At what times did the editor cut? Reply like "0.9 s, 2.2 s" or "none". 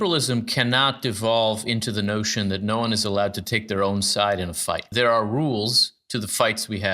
4.9 s